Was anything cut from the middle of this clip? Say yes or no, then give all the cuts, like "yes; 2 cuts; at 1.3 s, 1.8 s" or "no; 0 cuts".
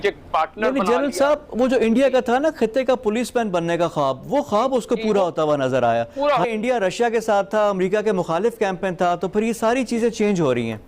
yes; 1 cut; at 6.5 s